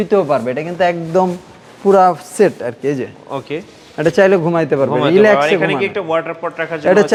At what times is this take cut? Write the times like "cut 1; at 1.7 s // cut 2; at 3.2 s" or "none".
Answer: none

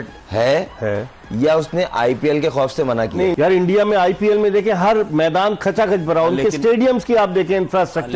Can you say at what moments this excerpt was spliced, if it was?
cut 1; at 3.3 s

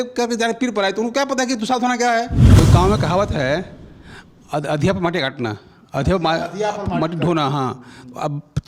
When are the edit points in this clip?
cut 1; at 2.4 s

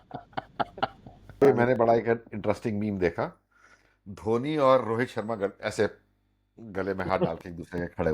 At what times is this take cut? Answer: cut 1; at 1.4 s

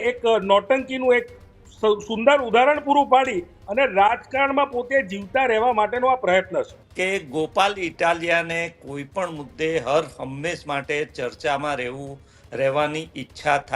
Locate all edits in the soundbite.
cut 1; at 6.8 s

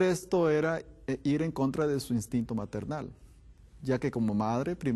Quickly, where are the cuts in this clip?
cut 1; at 1.9 s

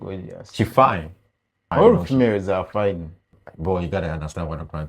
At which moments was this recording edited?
cut 1; at 1.7 s // cut 2; at 3.3 s

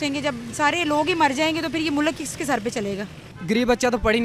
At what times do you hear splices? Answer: cut 1; at 3.3 s

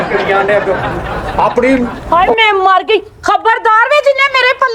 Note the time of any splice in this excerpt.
cut 1; at 2.0 s

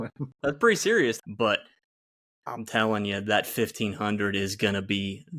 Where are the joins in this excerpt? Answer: cut 1; at 1.2 s

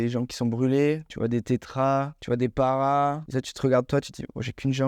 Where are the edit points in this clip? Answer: cut 1; at 1.1 s // cut 2; at 2.2 s // cut 3; at 3.2 s

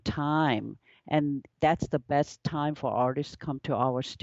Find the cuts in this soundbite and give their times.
none

